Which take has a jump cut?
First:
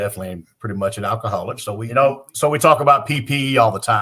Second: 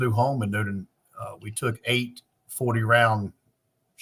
first; 1 cut; at 1.8 s

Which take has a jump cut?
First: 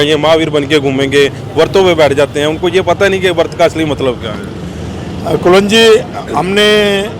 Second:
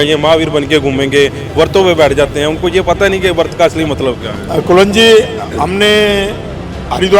second; 1 cut; at 4.3 s

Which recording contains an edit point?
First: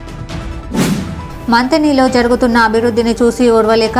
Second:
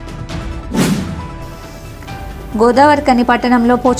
first; 1 cut; at 0.9 s

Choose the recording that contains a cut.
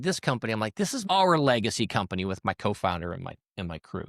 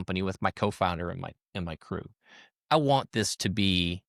first; 1 cut; at 1.0 s

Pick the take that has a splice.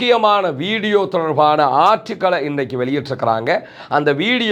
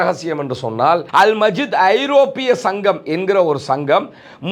second; 1 cut; at 1.1 s

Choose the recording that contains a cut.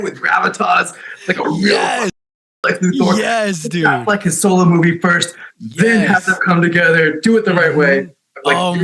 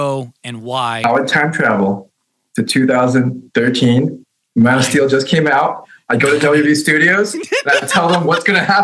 second; 1 cut; at 1.0 s

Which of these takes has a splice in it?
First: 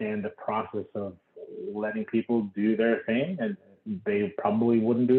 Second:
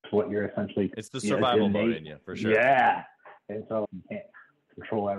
second; 2 cuts; at 0.9 s, 3.9 s

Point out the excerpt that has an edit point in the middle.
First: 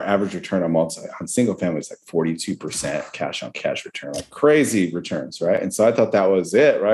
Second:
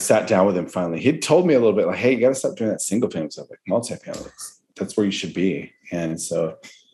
second; 1 cut; at 4.7 s

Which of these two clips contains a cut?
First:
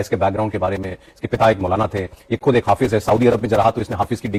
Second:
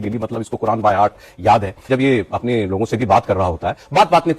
second; 1 cut; at 1.8 s

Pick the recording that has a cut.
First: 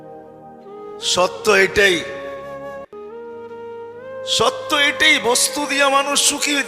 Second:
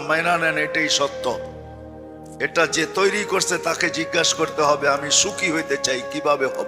first; 2 cuts; at 2.0 s, 3.6 s

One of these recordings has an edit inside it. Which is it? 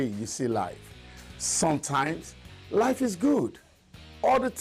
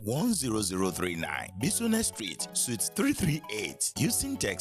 first; 2 cuts; at 2.8 s, 3.5 s

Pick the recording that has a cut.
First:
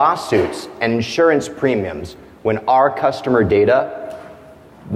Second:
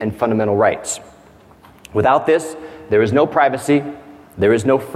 second; 1 cut; at 2.6 s

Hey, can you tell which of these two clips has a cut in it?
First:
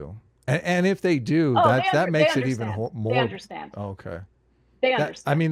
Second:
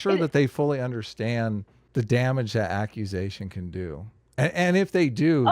second; 1 cut; at 1.8 s

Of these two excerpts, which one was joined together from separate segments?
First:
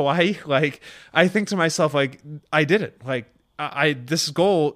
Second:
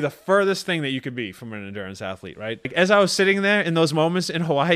second; 1 cut; at 2.7 s

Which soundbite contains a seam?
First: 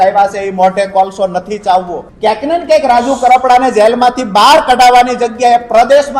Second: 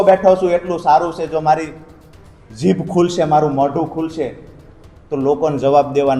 first; 1 cut; at 2.0 s

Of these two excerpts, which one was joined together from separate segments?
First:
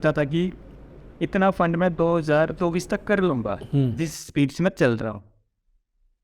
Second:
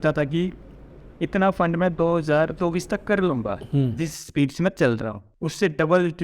second; 1 cut; at 5.2 s

